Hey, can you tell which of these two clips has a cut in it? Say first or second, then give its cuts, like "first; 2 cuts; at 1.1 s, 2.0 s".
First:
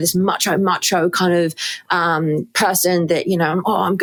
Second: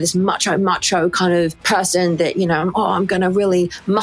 second; 1 cut; at 1.6 s